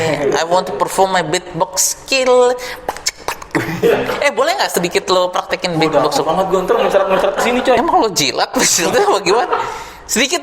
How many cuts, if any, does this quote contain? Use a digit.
1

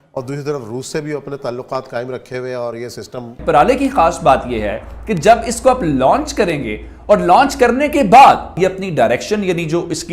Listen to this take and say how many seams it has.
2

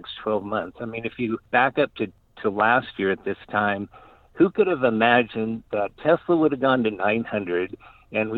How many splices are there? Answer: 0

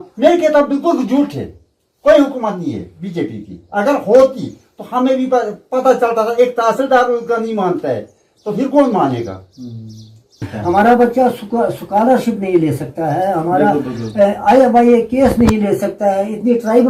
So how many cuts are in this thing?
1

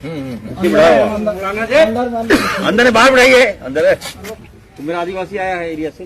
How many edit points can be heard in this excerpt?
1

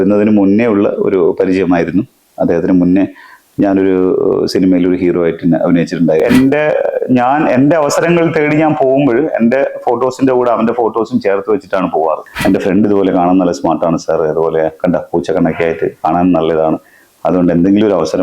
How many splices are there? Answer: 2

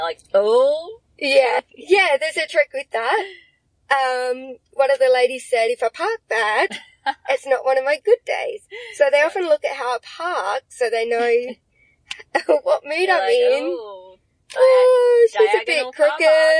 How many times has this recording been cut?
1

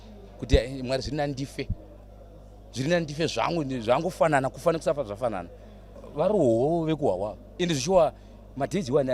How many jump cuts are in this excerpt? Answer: 1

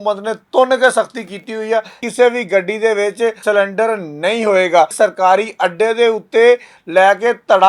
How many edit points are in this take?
3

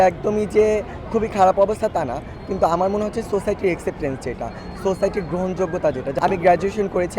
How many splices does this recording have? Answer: 1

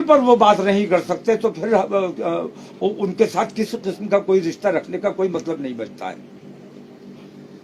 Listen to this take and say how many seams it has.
0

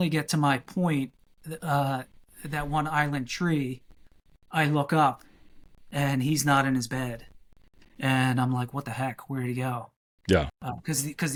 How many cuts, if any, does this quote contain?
0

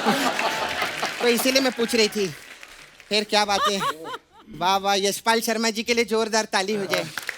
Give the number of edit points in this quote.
0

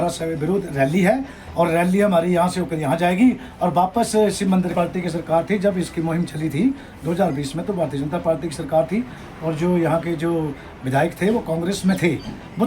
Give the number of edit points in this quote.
1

